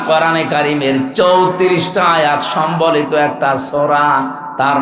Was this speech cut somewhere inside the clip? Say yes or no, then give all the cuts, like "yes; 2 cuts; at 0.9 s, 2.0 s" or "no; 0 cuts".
no; 0 cuts